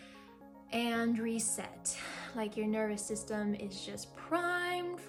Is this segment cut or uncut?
uncut